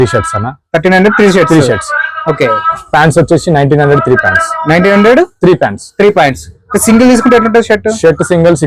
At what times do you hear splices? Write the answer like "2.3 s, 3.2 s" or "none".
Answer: none